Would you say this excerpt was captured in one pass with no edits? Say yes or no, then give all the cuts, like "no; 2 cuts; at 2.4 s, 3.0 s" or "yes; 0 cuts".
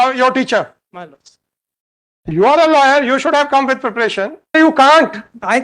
no; 1 cut; at 4.5 s